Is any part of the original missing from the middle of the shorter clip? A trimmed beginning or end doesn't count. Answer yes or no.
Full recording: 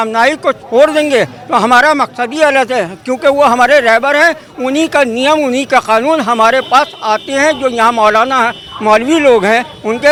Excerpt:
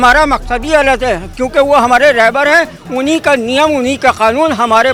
no